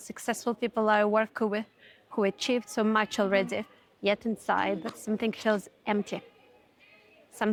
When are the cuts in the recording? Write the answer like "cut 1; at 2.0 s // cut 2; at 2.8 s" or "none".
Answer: none

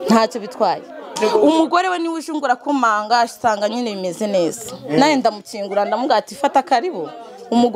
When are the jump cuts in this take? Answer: cut 1; at 1.1 s

